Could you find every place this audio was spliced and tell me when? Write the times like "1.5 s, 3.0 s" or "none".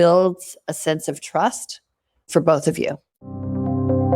2.3 s, 3.4 s